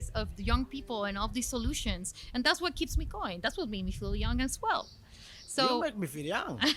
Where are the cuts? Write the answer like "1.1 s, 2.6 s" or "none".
none